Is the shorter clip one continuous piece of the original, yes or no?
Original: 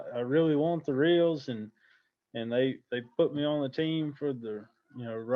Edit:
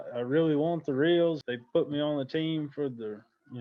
no